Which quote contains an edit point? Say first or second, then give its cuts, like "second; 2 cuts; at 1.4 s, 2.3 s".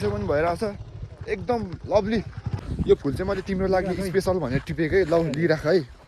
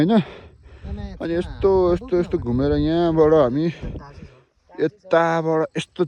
first; 1 cut; at 2.5 s